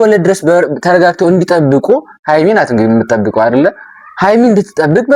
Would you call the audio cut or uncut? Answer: uncut